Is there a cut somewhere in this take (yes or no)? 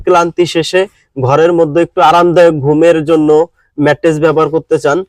no